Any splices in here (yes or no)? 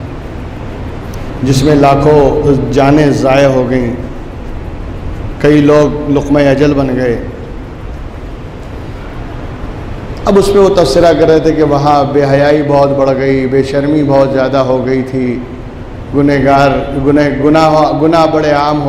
no